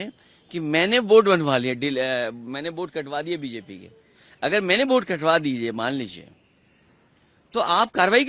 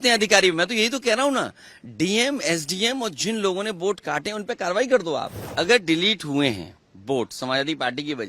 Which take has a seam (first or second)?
second